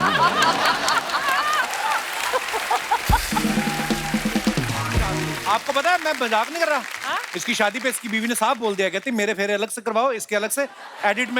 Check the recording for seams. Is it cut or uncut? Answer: cut